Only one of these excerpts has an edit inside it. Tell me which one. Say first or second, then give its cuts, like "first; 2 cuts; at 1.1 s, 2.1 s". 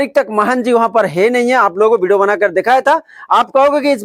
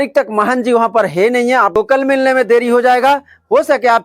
second; 1 cut; at 1.8 s